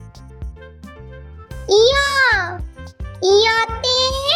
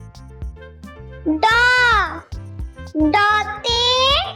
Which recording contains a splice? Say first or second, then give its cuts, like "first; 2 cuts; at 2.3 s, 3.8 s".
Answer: second; 1 cut; at 1.2 s